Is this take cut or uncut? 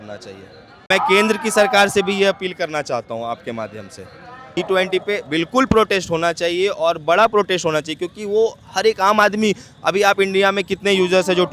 cut